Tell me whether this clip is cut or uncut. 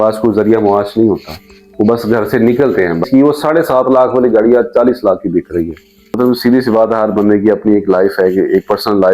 cut